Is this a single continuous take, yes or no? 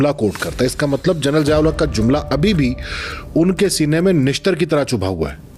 yes